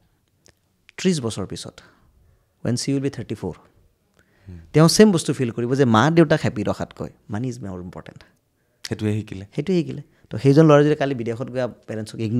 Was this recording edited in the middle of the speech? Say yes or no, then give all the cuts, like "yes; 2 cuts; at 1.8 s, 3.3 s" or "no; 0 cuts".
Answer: no; 0 cuts